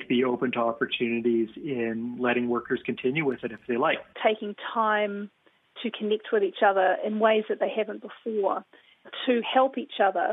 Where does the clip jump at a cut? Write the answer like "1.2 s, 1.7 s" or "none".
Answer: 4.1 s, 9.1 s